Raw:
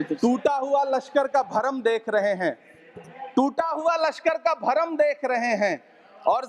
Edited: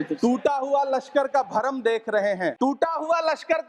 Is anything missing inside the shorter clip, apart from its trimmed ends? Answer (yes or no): yes